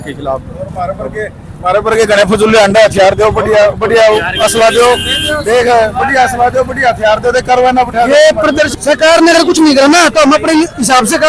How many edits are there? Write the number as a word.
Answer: one